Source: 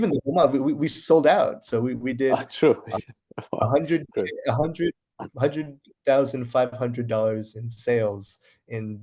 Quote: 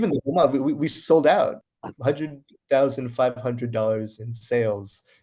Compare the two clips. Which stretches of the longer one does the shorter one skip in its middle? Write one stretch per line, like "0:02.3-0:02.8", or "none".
0:01.6-0:05.0